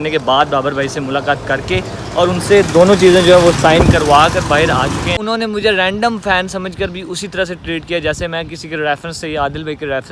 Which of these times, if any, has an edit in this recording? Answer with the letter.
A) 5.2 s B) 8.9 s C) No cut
A